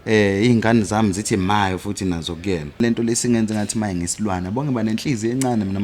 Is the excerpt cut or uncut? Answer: cut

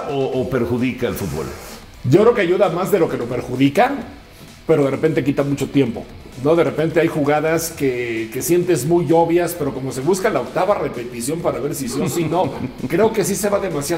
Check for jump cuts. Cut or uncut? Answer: uncut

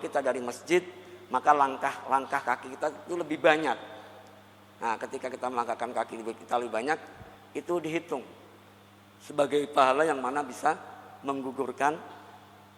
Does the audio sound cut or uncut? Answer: uncut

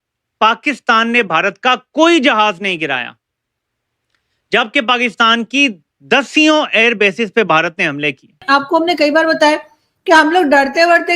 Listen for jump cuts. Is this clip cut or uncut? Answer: cut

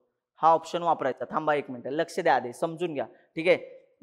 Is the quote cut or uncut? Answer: uncut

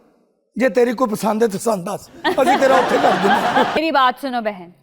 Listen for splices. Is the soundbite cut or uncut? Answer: cut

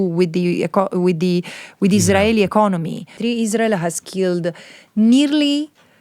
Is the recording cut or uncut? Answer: cut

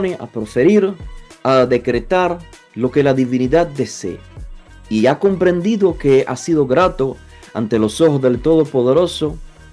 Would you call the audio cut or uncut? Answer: uncut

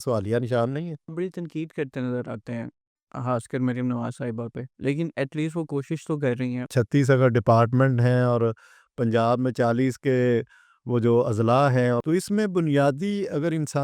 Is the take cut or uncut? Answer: cut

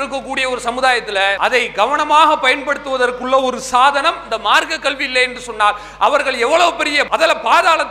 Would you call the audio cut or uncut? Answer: cut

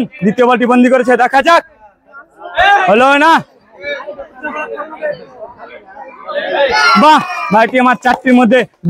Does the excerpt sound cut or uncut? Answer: uncut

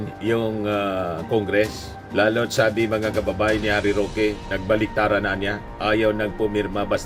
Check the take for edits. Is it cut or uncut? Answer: uncut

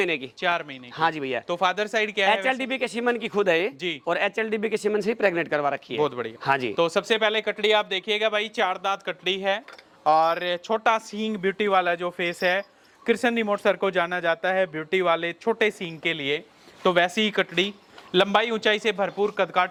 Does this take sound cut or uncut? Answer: uncut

